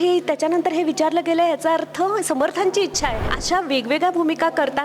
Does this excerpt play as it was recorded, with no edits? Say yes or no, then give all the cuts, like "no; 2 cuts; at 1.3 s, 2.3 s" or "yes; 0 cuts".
no; 1 cut; at 3.3 s